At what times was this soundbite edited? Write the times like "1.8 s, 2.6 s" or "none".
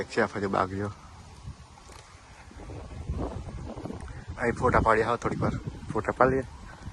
none